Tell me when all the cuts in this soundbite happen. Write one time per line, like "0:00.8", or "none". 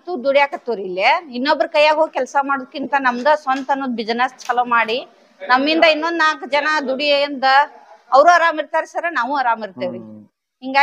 none